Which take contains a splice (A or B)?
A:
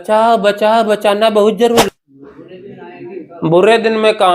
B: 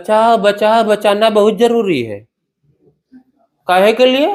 A